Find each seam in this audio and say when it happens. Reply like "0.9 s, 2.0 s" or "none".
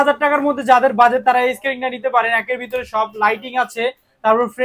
none